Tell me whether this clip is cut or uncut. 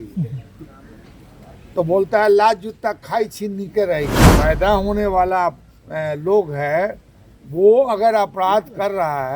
cut